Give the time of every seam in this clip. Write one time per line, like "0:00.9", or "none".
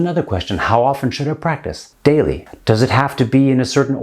0:02.5